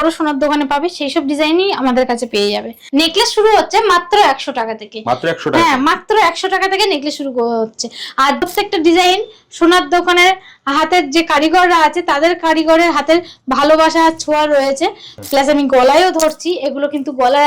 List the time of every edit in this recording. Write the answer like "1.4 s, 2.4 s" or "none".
2.8 s, 8.4 s, 15.1 s